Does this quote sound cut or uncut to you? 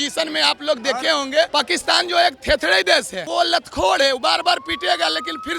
cut